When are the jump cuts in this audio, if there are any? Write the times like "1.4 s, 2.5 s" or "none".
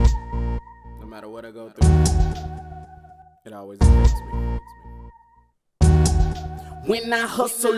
none